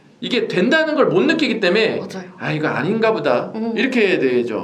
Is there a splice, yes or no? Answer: no